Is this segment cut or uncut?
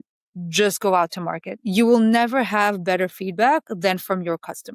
uncut